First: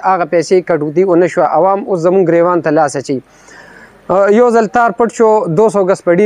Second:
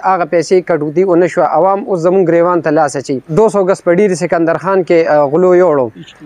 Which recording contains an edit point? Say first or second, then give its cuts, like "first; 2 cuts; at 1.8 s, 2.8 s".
second; 1 cut; at 3.3 s